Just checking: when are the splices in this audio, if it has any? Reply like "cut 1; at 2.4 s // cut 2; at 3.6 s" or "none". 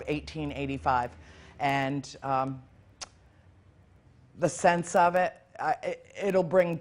cut 1; at 5.2 s